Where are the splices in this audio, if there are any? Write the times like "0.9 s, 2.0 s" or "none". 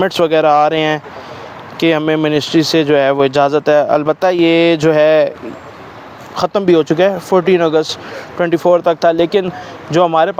none